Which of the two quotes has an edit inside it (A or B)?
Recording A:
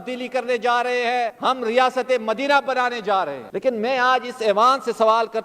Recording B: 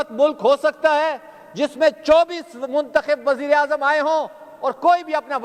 A